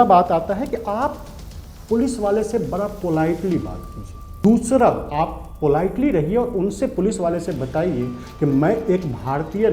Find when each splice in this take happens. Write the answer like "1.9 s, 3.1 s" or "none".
4.3 s